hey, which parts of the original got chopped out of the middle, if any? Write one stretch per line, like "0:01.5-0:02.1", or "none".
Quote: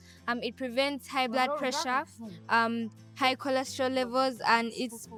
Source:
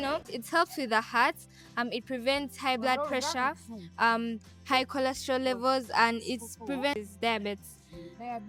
none